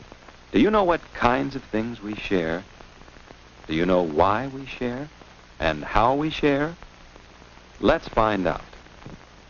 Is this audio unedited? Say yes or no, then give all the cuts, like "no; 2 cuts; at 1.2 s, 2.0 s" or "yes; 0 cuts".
yes; 0 cuts